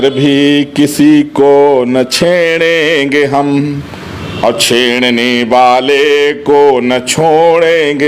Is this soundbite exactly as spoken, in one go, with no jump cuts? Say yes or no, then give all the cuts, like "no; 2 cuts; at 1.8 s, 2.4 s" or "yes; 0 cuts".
yes; 0 cuts